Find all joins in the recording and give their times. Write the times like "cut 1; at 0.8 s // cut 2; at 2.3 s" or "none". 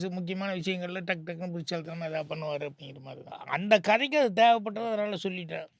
cut 1; at 3.4 s